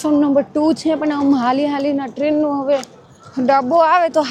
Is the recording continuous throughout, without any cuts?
yes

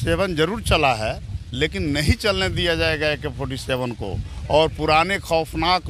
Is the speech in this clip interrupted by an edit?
no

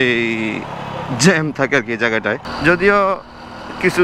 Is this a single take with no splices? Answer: no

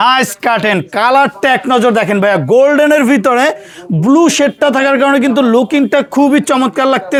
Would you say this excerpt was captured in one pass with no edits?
yes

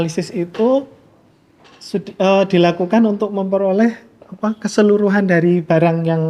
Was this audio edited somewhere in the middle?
no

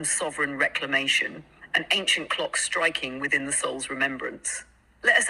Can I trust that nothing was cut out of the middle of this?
yes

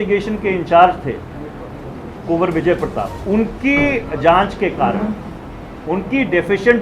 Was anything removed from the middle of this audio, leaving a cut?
yes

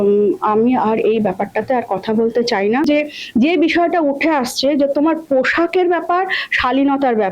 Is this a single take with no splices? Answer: no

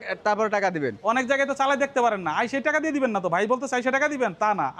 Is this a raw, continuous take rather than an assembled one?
yes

